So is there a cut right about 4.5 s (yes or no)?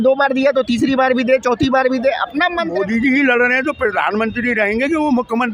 no